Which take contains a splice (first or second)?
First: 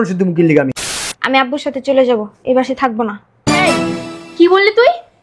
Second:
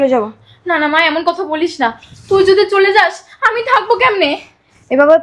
first